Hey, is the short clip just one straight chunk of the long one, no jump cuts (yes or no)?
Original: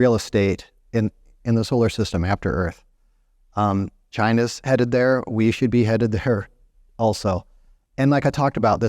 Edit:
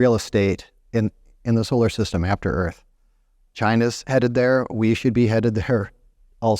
no